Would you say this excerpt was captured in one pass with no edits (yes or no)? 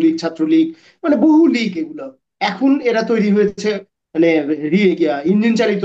yes